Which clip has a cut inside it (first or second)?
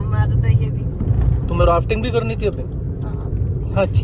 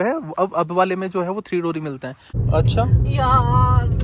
second